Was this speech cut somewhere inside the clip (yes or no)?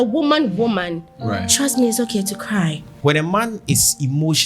yes